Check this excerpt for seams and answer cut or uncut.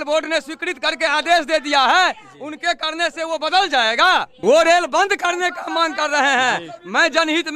cut